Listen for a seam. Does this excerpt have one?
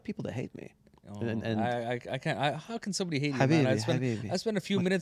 no; 0 cuts

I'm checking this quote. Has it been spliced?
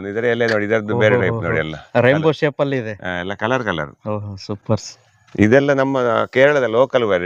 no; 0 cuts

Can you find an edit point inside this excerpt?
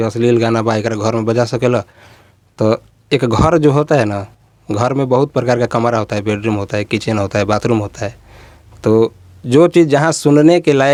no; 0 cuts

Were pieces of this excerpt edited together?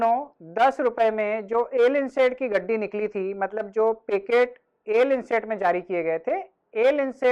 no; 0 cuts

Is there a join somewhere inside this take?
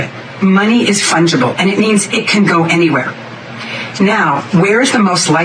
no; 0 cuts

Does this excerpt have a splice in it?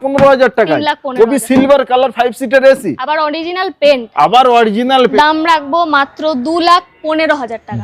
yes; 1 cut; at 5.1 s

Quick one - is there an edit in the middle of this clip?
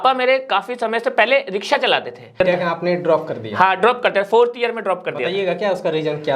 yes; 1 cut; at 2.4 s

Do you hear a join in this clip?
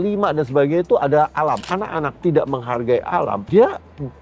yes; 1 cut; at 1.6 s

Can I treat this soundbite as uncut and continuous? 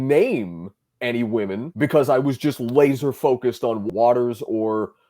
no; 1 cut; at 3.8 s

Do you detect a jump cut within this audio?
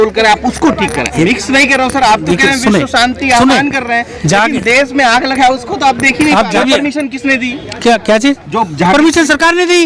yes; 2 cuts; at 1.2 s, 6.6 s

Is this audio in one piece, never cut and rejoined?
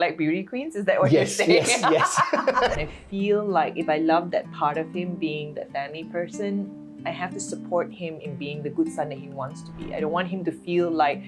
no; 1 cut; at 2.7 s

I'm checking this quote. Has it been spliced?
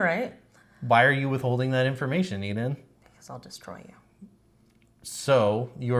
no; 0 cuts

